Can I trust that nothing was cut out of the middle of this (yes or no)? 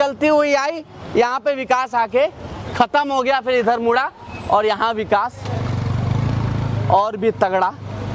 yes